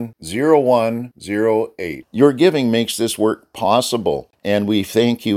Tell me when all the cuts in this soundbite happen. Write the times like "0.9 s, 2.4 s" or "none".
4.3 s